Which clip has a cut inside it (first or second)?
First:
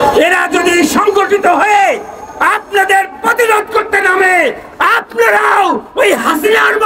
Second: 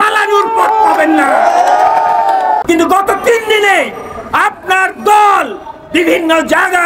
second